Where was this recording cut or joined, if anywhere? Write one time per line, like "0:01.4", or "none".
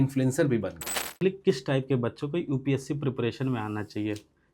0:01.2